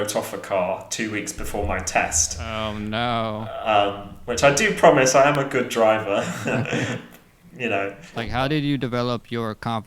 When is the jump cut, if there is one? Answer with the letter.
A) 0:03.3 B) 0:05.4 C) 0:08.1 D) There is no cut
C